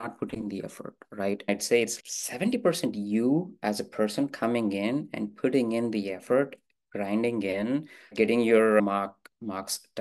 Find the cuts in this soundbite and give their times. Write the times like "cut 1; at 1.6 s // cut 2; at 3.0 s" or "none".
cut 1; at 1.5 s